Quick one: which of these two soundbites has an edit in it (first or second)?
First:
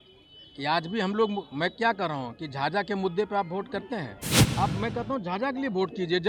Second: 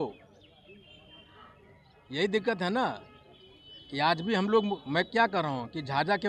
first